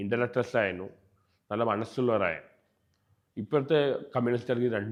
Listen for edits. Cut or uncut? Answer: uncut